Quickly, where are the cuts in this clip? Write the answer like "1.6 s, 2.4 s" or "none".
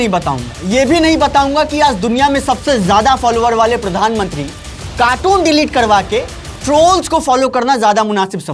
none